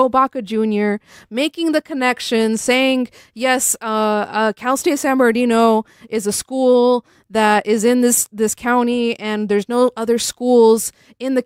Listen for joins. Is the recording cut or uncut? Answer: uncut